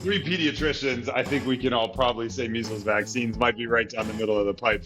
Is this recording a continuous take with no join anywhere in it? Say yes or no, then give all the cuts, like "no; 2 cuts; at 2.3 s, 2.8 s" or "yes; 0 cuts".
yes; 0 cuts